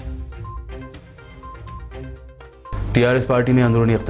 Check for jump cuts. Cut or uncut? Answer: cut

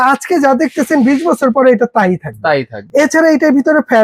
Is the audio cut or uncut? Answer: uncut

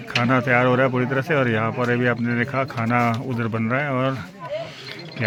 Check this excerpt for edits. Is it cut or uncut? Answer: uncut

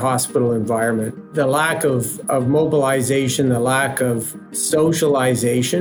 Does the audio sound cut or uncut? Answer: cut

